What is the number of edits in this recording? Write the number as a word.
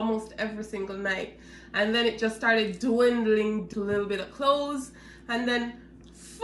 one